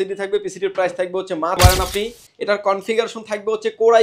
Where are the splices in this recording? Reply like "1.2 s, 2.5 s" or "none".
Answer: 1.6 s